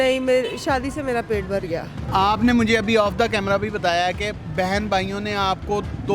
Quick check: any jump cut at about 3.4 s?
no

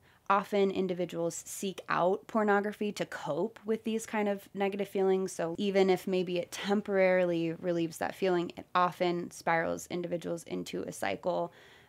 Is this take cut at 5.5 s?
yes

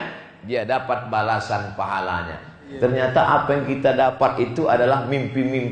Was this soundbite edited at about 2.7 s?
yes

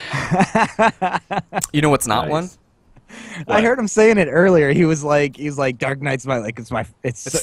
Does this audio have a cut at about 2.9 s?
no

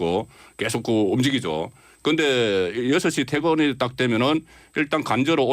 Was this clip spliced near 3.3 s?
yes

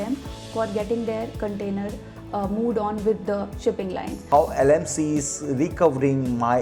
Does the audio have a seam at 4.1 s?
yes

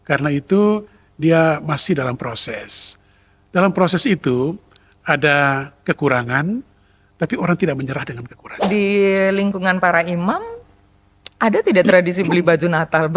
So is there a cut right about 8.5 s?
yes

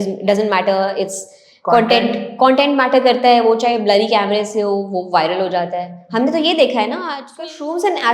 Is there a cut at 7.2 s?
yes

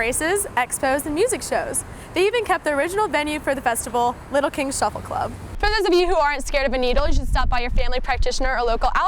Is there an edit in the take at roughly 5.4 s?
yes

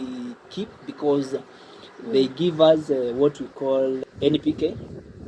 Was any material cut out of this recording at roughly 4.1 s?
yes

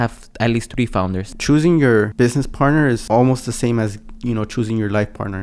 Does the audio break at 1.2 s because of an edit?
yes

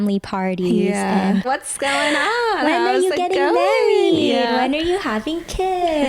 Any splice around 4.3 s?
no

